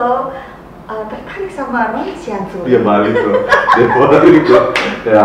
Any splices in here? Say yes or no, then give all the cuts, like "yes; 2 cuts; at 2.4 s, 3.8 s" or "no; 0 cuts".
yes; 1 cut; at 3.5 s